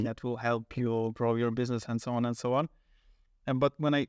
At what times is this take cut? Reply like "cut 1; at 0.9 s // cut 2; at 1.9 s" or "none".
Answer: none